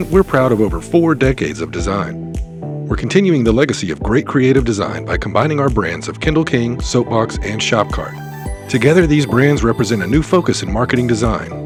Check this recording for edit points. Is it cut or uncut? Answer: uncut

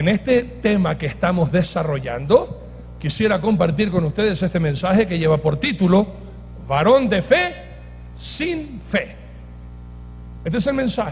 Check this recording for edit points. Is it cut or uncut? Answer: uncut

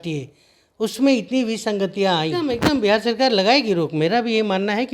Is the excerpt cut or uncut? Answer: cut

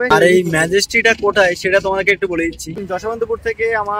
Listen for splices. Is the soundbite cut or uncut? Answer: cut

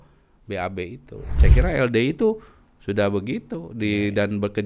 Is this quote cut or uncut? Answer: cut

